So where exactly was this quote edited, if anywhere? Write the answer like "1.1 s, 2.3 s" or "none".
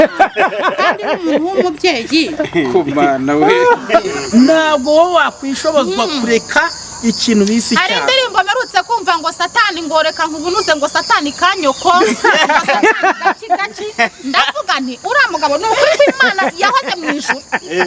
4.1 s